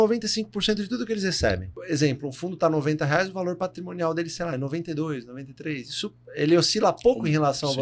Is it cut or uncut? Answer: cut